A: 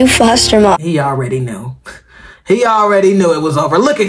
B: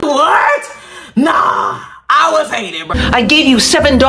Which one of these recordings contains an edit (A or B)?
B